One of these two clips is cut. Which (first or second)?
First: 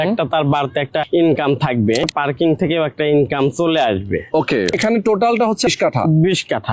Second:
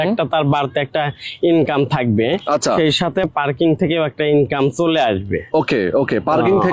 first